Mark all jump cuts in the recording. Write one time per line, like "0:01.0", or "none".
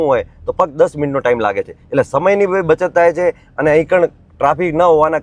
none